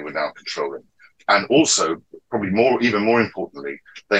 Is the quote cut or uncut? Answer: uncut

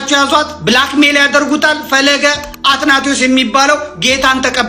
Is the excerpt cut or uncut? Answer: uncut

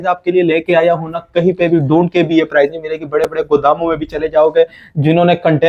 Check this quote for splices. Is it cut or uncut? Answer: uncut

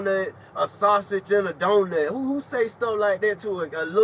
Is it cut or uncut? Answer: uncut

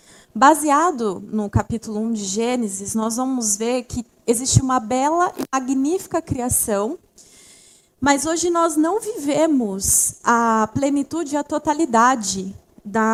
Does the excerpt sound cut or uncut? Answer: uncut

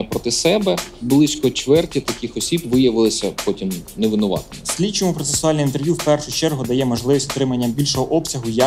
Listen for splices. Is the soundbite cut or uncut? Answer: cut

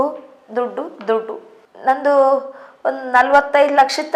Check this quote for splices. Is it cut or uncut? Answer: uncut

